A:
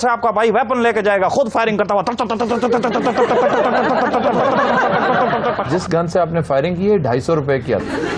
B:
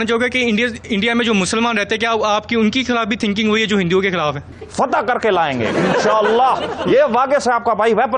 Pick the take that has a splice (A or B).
B